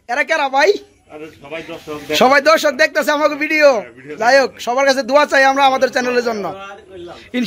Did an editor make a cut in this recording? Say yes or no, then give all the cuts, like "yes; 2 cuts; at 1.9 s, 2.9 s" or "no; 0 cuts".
no; 0 cuts